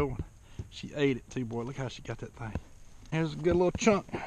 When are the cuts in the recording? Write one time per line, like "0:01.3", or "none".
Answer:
0:03.0